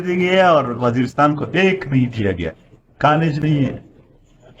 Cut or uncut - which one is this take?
uncut